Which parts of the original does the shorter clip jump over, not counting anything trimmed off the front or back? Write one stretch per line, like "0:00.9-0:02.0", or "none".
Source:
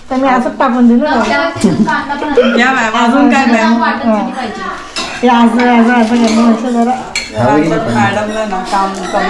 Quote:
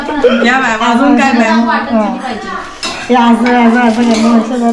none